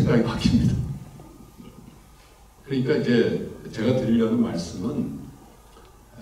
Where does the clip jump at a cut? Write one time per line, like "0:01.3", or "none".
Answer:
0:02.5